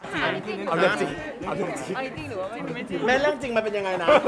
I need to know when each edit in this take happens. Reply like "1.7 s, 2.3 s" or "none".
none